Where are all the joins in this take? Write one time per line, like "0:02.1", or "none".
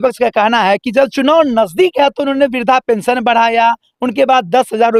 none